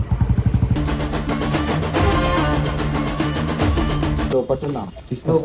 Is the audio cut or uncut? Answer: cut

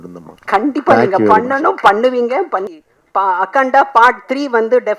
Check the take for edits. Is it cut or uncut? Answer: cut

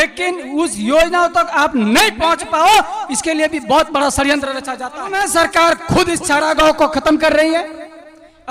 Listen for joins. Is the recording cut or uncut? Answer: cut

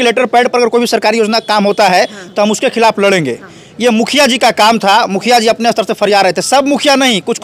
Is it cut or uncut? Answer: uncut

